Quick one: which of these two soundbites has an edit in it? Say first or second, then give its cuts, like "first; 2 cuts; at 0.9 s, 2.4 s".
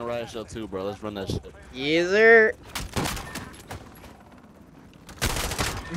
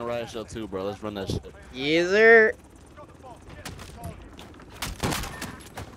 first; 1 cut; at 2.7 s